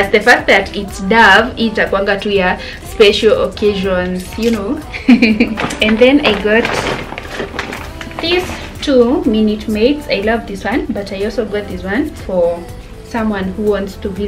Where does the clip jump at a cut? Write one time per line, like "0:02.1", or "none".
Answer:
0:05.5